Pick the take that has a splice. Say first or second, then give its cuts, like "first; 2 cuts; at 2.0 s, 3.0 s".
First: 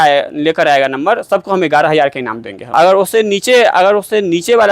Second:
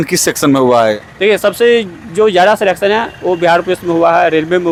first; 1 cut; at 2.7 s